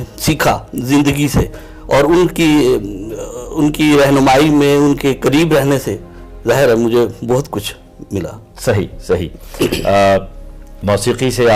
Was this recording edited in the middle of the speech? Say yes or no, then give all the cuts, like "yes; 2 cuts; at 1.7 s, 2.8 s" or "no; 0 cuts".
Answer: no; 0 cuts